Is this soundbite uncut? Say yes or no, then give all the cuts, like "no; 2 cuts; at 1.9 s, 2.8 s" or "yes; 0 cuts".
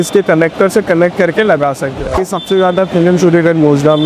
no; 1 cut; at 2.2 s